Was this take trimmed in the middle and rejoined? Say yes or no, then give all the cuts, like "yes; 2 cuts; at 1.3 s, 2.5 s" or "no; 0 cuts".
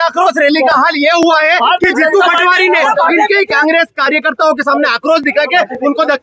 no; 0 cuts